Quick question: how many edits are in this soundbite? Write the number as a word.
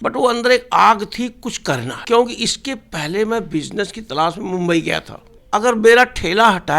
two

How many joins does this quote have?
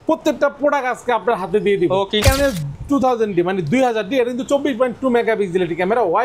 one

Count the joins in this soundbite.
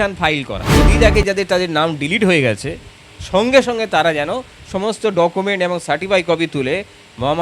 one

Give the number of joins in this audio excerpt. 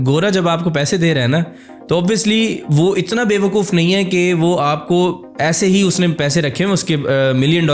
zero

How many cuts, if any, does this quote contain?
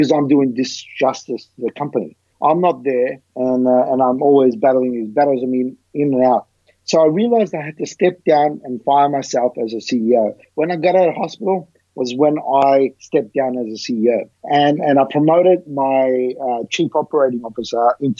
four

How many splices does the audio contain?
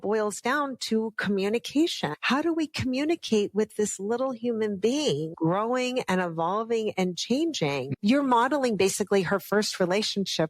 three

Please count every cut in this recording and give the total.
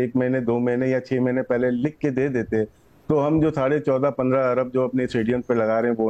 zero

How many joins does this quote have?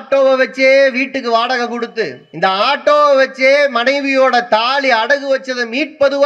one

